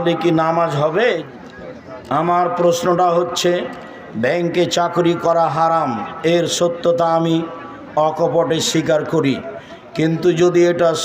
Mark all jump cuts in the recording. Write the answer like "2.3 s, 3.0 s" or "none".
1.3 s